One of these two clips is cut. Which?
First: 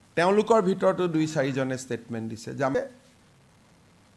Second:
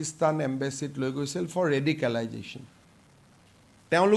first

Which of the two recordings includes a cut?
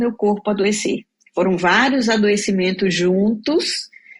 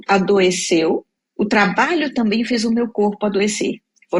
second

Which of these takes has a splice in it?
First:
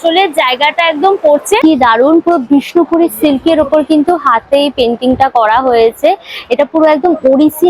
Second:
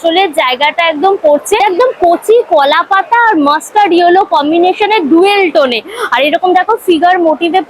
first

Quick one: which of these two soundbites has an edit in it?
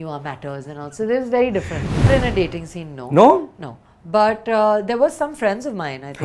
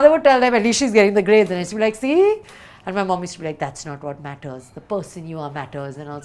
first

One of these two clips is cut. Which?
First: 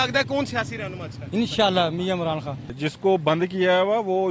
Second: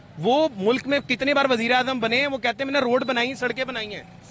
first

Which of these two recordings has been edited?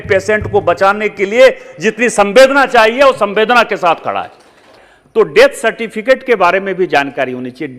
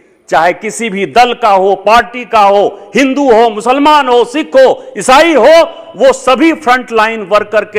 first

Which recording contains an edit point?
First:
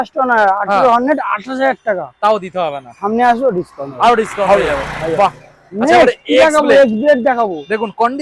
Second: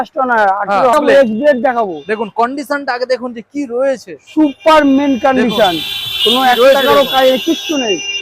second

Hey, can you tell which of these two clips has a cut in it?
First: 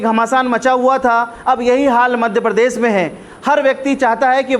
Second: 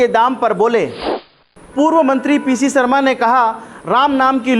second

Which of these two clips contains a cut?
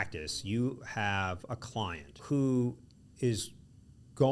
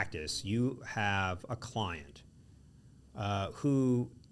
first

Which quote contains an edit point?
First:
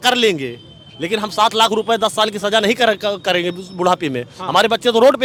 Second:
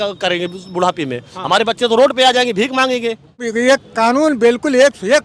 second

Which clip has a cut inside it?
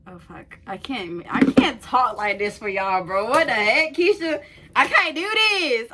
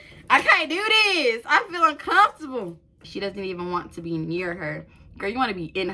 second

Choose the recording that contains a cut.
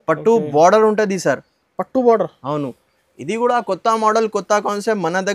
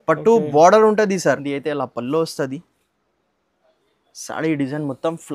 second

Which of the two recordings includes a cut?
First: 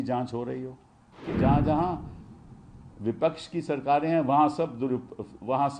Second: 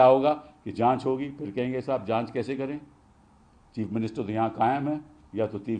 first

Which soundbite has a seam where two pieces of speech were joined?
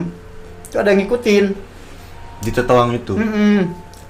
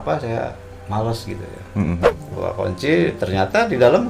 second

